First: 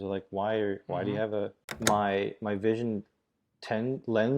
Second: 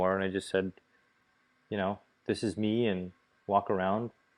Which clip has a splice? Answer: first; 1 cut; at 1.6 s

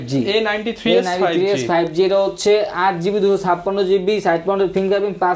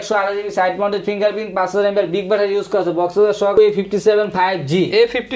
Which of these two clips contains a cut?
second; 1 cut; at 3.5 s

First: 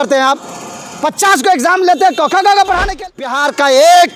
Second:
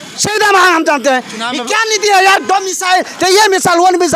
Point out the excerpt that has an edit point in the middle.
first; 1 cut; at 3.3 s

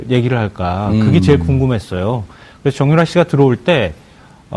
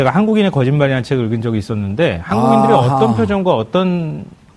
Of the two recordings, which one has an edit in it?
first; 1 cut; at 2.8 s

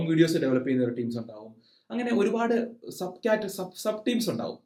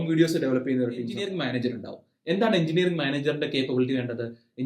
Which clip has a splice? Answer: second; 1 cut; at 1.2 s

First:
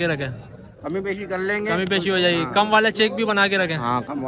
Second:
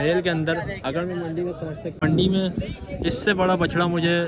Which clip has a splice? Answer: second; 1 cut; at 2.0 s

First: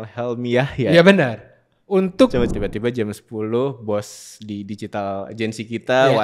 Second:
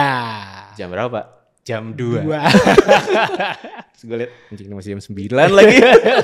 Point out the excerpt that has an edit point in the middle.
first; 1 cut; at 2.5 s

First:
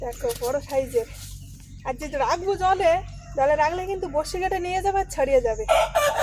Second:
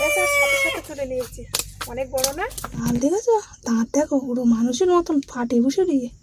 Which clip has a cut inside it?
second; 1 cut; at 2.8 s

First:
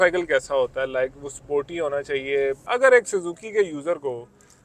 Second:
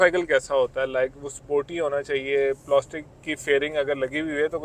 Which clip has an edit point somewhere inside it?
first; 1 cut; at 2.6 s

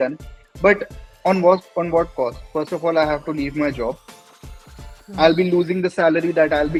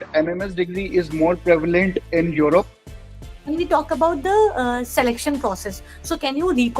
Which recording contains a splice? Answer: second; 1 cut; at 3.0 s

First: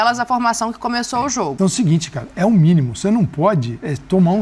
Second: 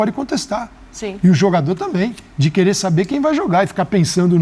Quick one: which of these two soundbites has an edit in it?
first; 1 cut; at 1.5 s

